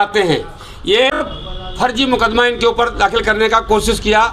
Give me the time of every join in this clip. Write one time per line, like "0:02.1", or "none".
0:01.2

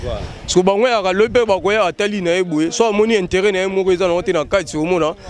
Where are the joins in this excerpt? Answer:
none

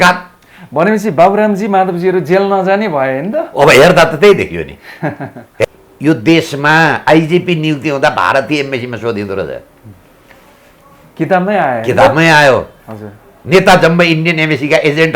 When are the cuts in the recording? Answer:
0:05.6

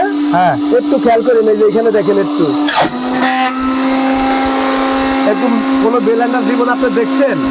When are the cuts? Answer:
none

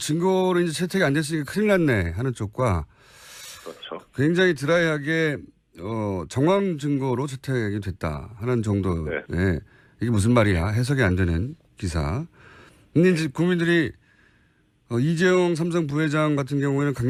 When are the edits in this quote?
none

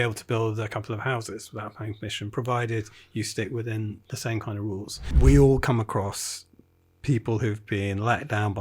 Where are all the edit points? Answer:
0:05.1

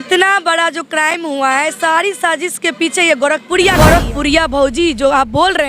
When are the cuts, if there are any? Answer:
0:03.7

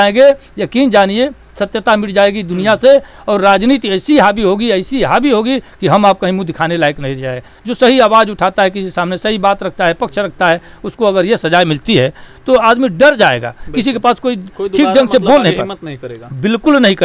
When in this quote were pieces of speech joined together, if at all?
none

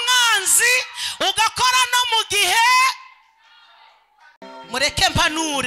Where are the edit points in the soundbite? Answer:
0:04.5

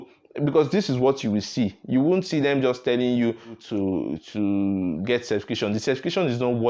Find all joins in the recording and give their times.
0:03.6

